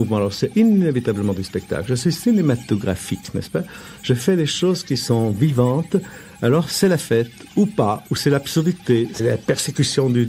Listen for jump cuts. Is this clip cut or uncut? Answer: cut